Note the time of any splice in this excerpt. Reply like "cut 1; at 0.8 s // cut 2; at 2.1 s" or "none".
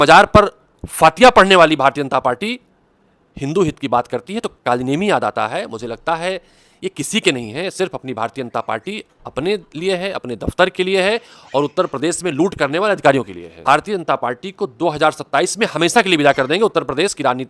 cut 1; at 13.6 s